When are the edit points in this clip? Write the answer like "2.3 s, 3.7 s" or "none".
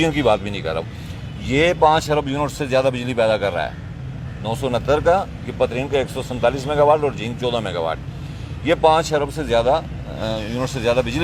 none